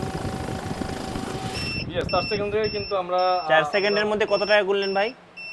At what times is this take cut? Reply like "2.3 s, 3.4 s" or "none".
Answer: none